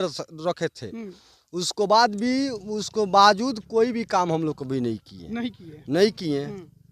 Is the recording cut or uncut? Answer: uncut